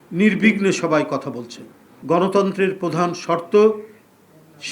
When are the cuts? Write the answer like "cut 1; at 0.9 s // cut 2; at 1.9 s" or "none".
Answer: cut 1; at 1.9 s